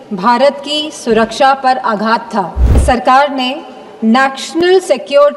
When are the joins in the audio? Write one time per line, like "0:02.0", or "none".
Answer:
0:02.8